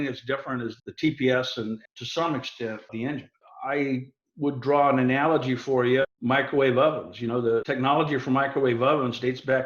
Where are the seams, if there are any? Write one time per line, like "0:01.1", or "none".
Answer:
0:00.8
0:01.9
0:02.9
0:06.1
0:07.7